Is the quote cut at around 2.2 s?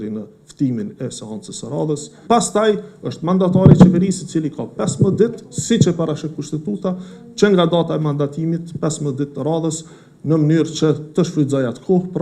yes; 1 cut; at 2.2 s

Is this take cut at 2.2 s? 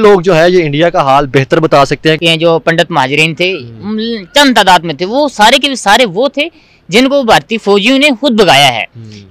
yes; 1 cut; at 2.2 s

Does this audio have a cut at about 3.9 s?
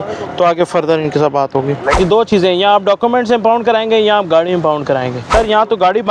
no; 2 cuts; at 1.9 s, 5.2 s

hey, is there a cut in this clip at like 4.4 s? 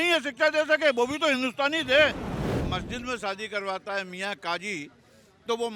no; 1 cut; at 2.6 s

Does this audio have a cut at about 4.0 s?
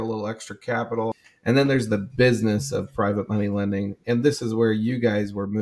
no; 1 cut; at 1.1 s

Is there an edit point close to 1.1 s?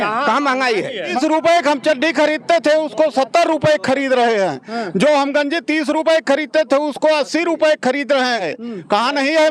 yes; 2 cuts; at 1.1 s, 8.5 s

